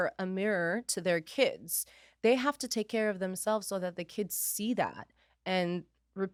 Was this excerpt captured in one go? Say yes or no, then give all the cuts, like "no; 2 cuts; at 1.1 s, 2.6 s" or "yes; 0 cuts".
yes; 0 cuts